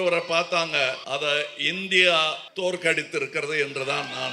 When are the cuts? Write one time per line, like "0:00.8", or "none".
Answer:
0:01.0
0:02.4